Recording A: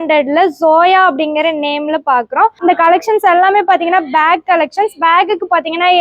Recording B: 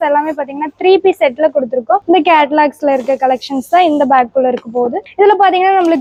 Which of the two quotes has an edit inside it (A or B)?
A